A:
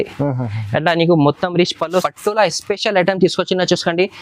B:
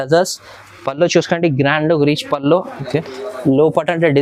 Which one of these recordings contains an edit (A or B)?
A